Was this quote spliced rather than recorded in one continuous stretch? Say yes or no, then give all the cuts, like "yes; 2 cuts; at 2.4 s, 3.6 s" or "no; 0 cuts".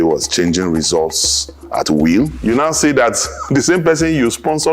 yes; 1 cut; at 2.3 s